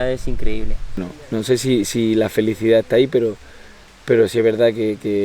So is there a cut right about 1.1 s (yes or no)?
yes